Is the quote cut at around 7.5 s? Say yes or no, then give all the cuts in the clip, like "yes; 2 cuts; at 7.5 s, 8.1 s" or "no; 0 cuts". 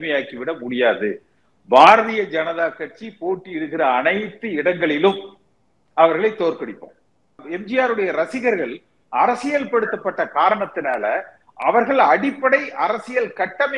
yes; 1 cut; at 7.5 s